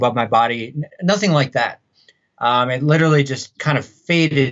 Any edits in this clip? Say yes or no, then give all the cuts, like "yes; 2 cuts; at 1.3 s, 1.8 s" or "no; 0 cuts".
yes; 1 cut; at 3.5 s